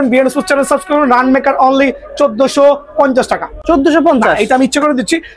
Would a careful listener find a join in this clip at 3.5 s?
no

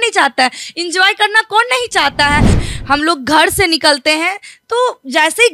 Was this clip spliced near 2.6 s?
yes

